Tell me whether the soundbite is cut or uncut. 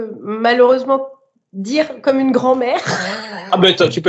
uncut